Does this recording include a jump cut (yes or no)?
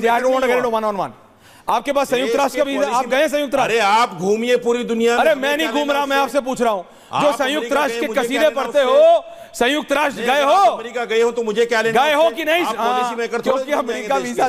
no